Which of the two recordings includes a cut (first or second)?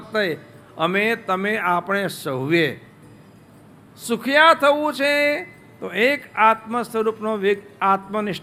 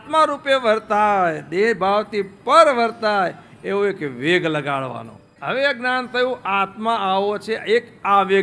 second